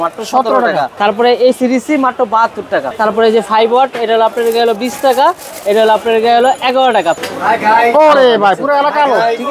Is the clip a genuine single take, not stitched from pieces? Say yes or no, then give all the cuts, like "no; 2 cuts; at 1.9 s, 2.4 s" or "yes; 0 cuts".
no; 3 cuts; at 0.9 s, 2.9 s, 7.2 s